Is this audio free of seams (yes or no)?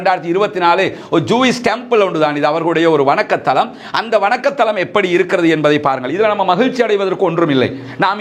yes